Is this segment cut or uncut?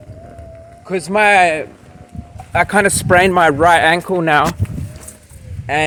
uncut